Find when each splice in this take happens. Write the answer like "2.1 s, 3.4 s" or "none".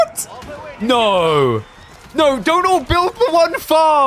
none